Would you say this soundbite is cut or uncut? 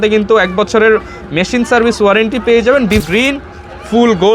cut